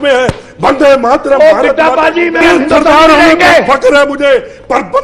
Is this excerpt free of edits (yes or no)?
no